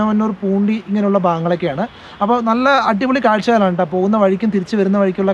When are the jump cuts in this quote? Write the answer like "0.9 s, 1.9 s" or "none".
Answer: none